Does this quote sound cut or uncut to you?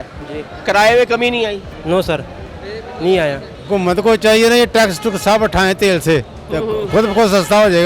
cut